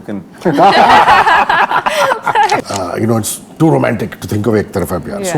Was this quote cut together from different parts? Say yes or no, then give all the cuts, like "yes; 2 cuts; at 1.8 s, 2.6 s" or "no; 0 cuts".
yes; 1 cut; at 2.6 s